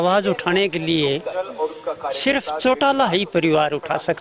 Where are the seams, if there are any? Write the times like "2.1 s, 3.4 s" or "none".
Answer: none